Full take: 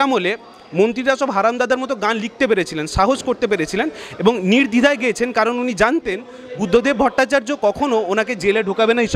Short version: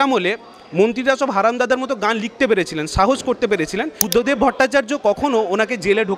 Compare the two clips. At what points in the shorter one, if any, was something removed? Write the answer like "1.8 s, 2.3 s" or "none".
4.0 s